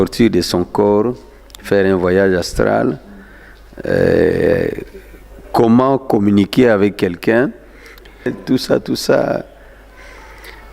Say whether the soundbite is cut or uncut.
cut